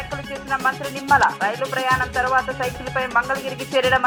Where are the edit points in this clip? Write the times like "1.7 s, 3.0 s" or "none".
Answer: none

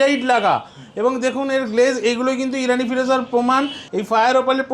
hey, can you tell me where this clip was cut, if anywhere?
3.8 s

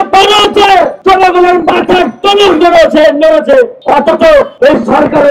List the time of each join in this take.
1.0 s, 3.8 s, 4.5 s

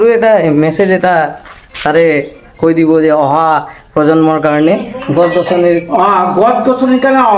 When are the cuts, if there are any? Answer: none

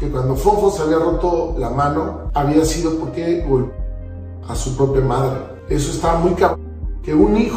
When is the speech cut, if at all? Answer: 2.2 s, 5.5 s

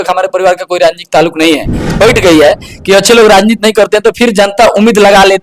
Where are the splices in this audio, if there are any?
1.9 s

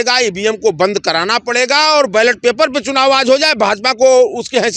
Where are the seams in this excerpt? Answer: none

